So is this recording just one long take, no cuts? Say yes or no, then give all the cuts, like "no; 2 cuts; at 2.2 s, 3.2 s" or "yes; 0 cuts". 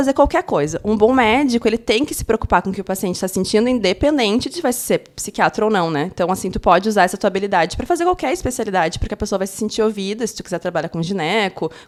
yes; 0 cuts